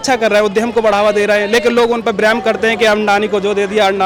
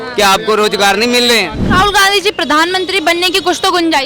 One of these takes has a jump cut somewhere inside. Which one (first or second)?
second